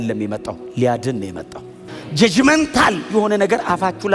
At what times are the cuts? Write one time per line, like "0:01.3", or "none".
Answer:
0:01.6